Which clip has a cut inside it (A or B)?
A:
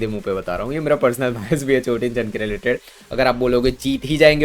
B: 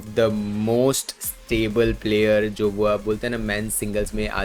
A